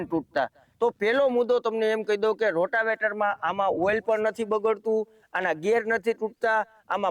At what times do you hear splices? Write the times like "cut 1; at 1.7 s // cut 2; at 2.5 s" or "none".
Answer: none

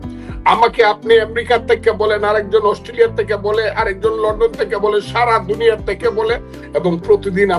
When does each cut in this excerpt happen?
cut 1; at 6.5 s

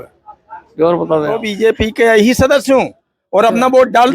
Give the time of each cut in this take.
cut 1; at 1.4 s

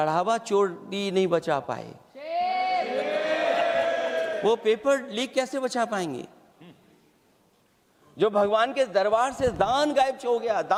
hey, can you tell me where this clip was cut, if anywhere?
none

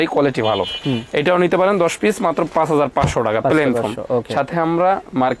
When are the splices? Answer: none

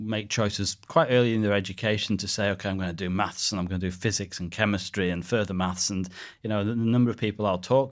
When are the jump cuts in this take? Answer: none

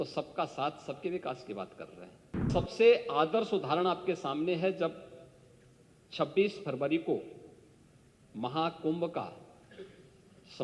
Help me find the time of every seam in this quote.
cut 1; at 2.5 s

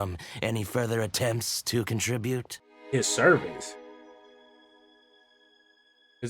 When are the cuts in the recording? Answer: cut 1; at 2.6 s

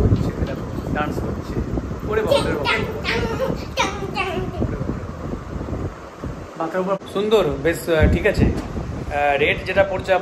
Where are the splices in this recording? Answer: cut 1; at 7.0 s

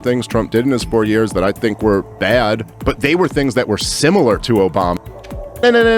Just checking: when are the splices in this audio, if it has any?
cut 1; at 5.0 s

